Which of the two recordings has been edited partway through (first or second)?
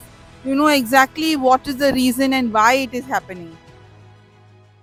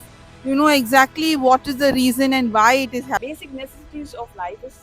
second